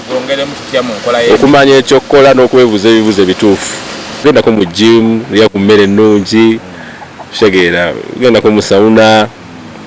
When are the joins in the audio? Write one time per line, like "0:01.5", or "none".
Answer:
0:04.2